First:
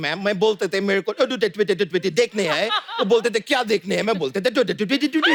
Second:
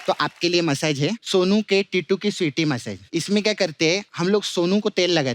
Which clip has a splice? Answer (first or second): second